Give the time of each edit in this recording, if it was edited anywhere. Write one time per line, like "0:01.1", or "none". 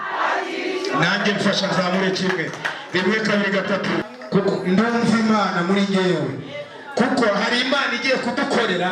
0:04.0